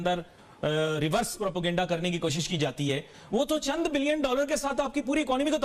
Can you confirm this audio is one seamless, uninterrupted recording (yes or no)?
yes